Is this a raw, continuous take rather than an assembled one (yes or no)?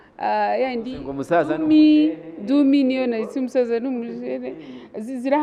yes